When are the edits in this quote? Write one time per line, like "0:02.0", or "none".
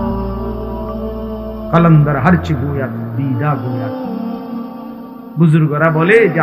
0:00.8
0:01.7